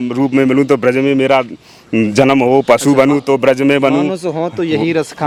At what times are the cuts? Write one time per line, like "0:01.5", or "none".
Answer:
none